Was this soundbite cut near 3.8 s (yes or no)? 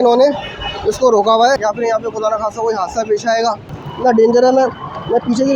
yes